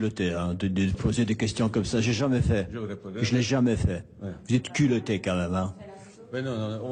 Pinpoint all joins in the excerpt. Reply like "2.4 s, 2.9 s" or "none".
none